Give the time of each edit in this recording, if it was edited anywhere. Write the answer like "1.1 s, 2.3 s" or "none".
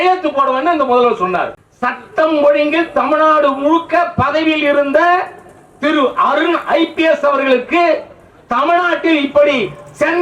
1.6 s